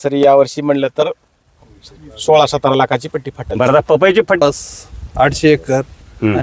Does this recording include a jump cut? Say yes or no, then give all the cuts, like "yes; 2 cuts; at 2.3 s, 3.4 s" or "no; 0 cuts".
yes; 1 cut; at 4.4 s